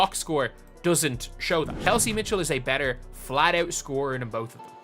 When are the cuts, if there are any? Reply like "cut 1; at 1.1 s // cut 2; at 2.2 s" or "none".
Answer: cut 1; at 1.7 s